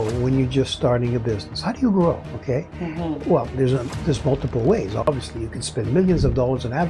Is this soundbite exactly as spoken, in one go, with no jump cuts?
yes; 0 cuts

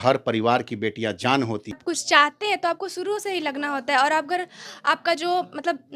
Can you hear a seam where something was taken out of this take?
yes; 1 cut; at 1.8 s

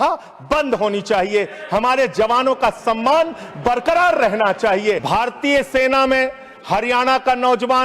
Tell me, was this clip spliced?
yes; 1 cut; at 5.0 s

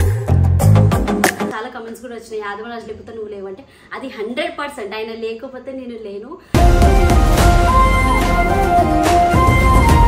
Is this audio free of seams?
no; 1 cut; at 1.5 s

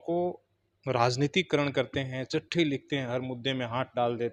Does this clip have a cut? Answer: no; 0 cuts

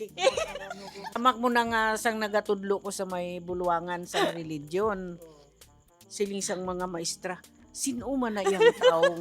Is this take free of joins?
no; 1 cut; at 1.2 s

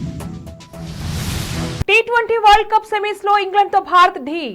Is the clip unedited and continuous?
no; 1 cut; at 1.8 s

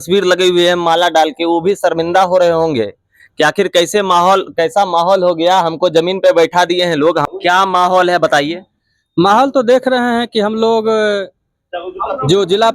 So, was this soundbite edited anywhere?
yes; 1 cut; at 7.3 s

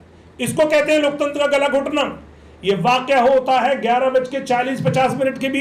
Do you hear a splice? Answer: no; 0 cuts

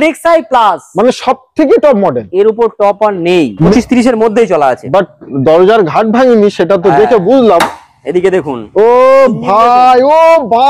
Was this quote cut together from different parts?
yes; 1 cut; at 3.7 s

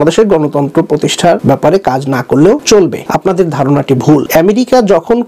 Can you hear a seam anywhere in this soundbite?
yes; 3 cuts; at 1.4 s, 2.8 s, 4.3 s

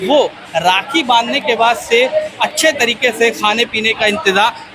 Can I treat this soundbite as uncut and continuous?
yes; 0 cuts

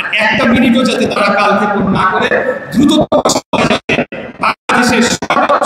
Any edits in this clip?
no; 0 cuts

